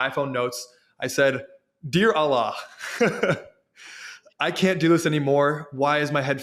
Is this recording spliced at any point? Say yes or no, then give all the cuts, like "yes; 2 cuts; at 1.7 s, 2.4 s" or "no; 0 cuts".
no; 0 cuts